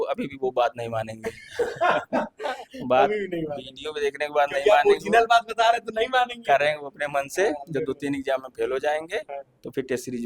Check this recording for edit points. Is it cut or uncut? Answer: uncut